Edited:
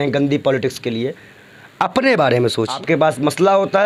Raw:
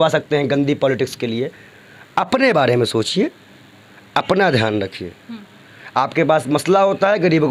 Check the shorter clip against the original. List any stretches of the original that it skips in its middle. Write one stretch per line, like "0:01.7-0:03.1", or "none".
0:03.1-0:06.0